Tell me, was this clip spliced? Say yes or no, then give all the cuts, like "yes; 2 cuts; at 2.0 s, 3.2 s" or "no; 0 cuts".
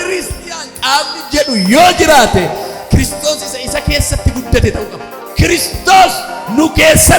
yes; 1 cut; at 5.2 s